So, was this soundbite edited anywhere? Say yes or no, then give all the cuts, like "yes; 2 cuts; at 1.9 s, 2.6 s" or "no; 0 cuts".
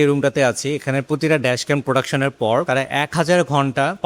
no; 0 cuts